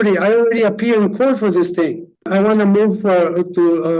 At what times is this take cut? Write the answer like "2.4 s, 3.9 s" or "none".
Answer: 2.3 s